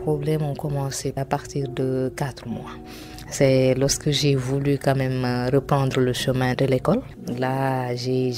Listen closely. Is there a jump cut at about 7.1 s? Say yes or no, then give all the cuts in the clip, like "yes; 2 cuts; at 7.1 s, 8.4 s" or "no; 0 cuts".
yes; 1 cut; at 7.1 s